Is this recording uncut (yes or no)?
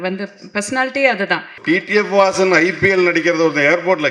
no